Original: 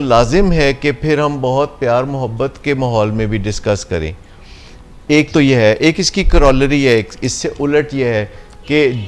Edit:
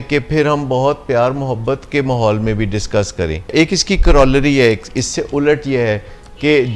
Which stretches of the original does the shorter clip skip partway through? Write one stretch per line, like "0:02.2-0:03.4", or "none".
0:04.2-0:05.8